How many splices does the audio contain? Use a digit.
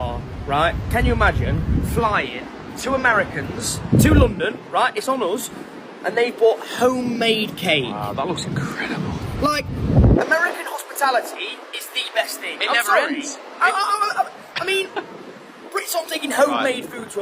0